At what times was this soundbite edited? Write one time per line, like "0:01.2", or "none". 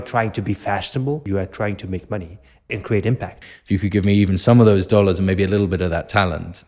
0:01.2
0:02.7
0:03.4